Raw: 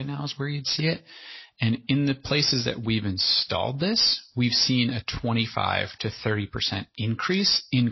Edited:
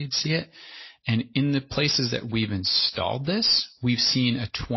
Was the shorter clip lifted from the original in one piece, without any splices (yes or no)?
yes